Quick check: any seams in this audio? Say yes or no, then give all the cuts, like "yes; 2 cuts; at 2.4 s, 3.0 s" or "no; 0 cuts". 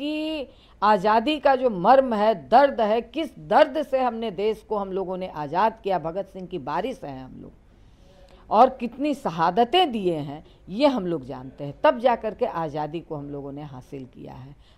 no; 0 cuts